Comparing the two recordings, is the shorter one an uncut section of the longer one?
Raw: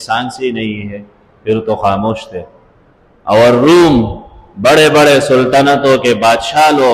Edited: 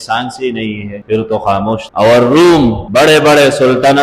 no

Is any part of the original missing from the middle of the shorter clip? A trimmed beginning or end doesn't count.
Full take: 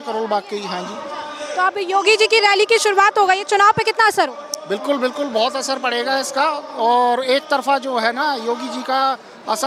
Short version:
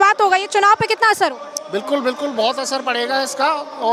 no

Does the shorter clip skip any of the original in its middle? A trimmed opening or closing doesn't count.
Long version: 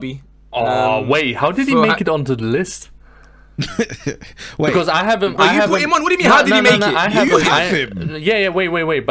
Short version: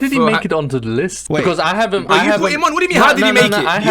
yes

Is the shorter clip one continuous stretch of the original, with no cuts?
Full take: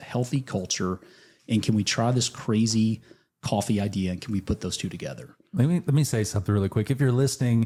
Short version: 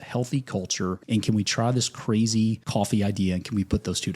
no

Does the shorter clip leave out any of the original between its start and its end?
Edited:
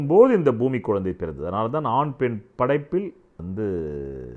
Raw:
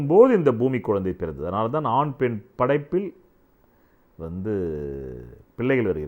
yes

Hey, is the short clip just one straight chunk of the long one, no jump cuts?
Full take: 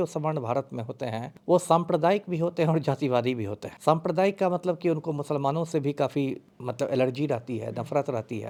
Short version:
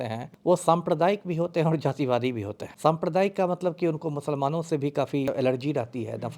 no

